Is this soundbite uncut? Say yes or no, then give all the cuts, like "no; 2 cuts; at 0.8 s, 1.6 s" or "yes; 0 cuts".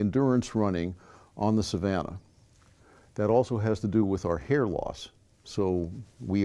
yes; 0 cuts